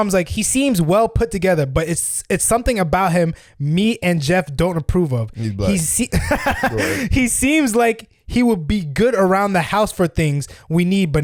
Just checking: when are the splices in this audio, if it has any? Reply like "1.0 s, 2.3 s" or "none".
none